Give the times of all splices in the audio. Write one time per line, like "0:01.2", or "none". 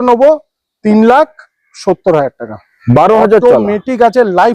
0:02.8